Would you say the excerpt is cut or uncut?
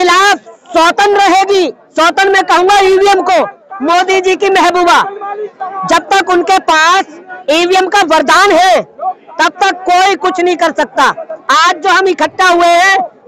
uncut